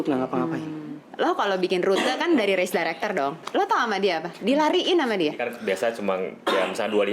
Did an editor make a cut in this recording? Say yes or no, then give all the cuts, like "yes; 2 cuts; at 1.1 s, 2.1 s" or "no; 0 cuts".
yes; 3 cuts; at 1.1 s, 3.4 s, 5.5 s